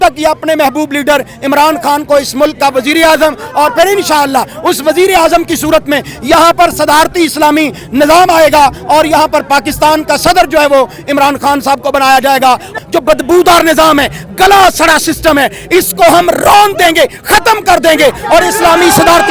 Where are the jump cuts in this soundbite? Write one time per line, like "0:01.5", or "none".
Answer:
0:12.7